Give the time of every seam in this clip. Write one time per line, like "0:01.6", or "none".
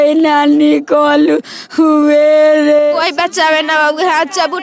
0:02.8